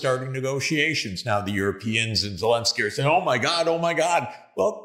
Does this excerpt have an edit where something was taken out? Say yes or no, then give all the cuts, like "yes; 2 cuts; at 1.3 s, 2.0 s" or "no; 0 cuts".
no; 0 cuts